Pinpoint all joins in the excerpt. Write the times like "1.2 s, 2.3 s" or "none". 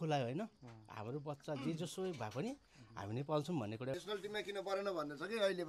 3.9 s